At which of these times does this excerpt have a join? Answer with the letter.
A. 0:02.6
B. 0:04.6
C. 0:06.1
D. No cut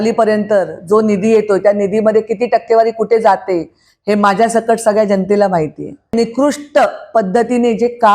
C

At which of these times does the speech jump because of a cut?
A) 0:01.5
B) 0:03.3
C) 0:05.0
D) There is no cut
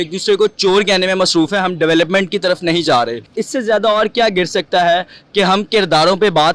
B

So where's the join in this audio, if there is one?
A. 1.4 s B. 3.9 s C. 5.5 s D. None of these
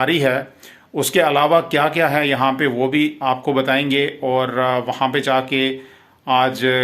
D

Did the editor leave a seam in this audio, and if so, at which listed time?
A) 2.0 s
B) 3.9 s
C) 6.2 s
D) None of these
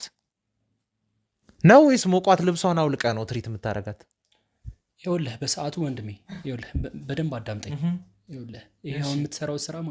D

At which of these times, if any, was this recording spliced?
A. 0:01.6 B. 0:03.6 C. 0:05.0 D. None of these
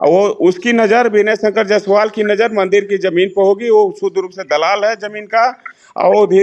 D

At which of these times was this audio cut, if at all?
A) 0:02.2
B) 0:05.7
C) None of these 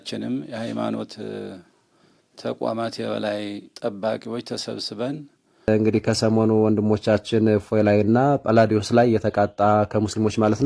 B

